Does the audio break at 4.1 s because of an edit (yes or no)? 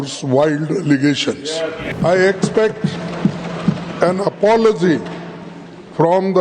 no